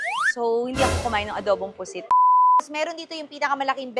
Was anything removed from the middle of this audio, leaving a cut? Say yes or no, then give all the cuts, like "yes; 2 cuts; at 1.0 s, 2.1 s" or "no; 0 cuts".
yes; 2 cuts; at 2.1 s, 2.7 s